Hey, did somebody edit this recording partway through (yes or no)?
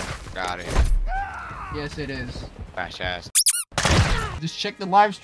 yes